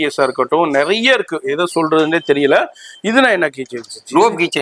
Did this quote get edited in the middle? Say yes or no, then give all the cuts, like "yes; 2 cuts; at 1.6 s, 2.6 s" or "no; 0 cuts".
no; 0 cuts